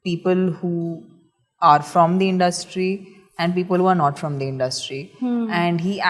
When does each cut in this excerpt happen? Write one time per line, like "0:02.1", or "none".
none